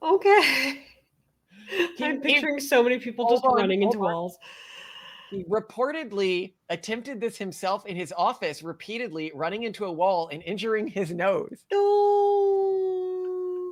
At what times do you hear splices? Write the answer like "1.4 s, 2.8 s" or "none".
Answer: none